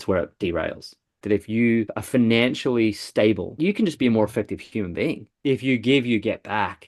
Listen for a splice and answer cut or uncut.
cut